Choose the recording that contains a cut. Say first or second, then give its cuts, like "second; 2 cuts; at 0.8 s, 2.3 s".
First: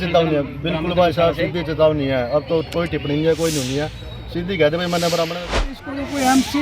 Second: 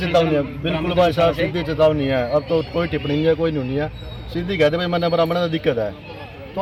first; 1 cut; at 5.6 s